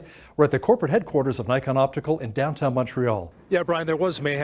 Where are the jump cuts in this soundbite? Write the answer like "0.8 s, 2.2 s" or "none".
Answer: 3.3 s